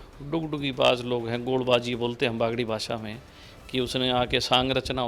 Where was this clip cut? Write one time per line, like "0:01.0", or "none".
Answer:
none